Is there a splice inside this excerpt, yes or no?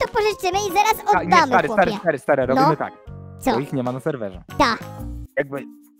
no